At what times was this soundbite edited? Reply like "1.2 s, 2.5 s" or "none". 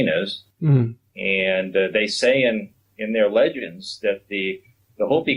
none